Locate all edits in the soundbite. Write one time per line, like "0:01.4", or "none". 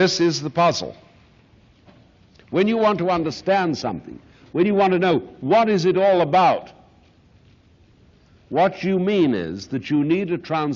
0:02.9